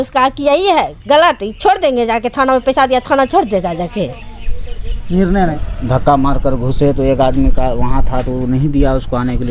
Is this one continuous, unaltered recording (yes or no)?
no